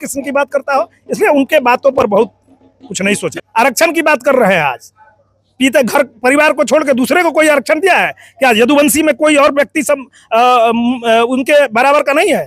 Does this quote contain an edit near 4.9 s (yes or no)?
no